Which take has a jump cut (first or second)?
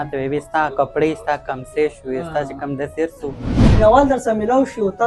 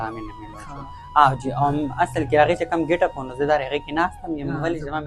first